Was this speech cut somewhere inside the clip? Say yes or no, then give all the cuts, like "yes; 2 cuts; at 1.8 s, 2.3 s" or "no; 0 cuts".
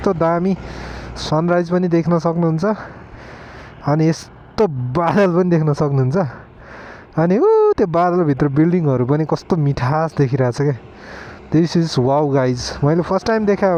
no; 0 cuts